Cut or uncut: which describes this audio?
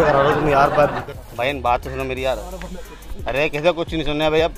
cut